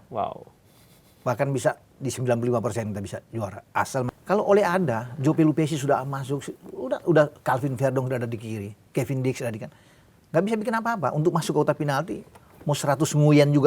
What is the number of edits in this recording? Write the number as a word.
one